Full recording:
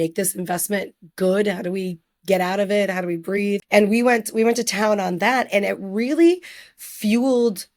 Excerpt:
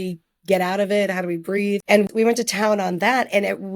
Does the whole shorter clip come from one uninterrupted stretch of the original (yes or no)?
no